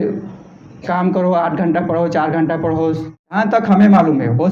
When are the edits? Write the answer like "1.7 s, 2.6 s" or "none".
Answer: 3.3 s